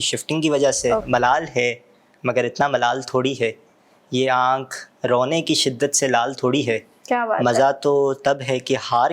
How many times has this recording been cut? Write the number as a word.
one